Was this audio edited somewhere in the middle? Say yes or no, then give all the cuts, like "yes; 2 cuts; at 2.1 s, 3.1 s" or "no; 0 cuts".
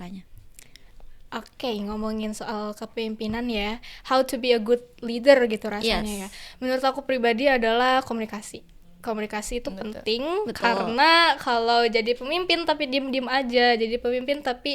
no; 0 cuts